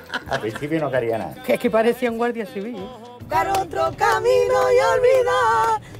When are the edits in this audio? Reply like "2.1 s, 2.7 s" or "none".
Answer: 1.3 s, 3.1 s